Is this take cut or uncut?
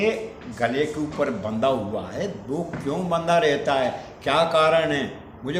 uncut